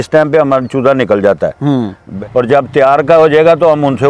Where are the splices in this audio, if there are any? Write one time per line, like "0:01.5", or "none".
0:02.1